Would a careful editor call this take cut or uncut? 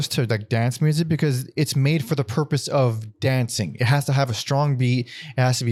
uncut